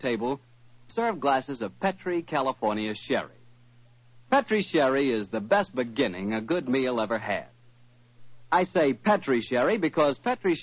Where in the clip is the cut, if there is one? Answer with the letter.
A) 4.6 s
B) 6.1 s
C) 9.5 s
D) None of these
C